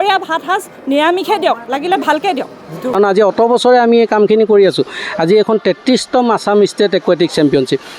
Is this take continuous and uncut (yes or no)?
no